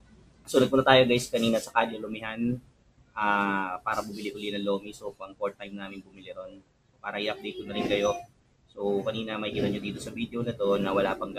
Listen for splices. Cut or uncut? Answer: uncut